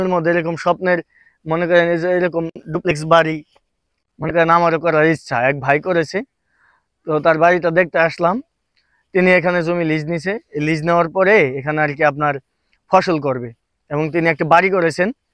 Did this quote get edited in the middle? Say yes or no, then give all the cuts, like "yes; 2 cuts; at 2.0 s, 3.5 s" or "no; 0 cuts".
no; 0 cuts